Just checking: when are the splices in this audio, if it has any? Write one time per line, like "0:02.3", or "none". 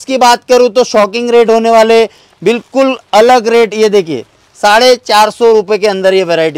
none